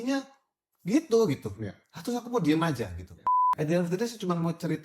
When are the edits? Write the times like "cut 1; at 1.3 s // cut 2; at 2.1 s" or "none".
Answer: cut 1; at 3.3 s